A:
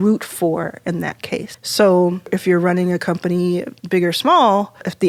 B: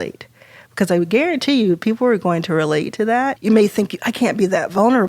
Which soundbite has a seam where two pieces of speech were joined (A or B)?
B